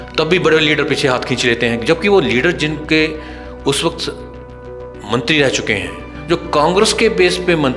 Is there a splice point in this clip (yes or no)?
no